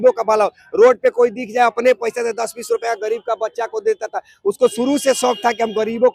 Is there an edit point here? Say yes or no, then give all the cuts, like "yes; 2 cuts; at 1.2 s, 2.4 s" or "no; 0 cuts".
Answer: no; 0 cuts